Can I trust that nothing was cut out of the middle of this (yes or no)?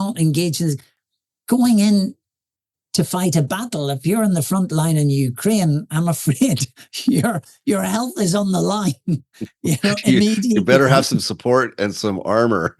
no